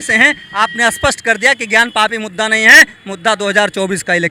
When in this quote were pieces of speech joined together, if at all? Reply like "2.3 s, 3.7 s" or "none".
none